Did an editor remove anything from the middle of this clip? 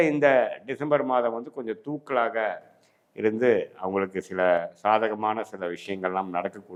no; 0 cuts

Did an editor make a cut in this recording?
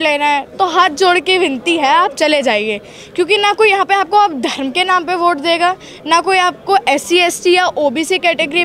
no; 0 cuts

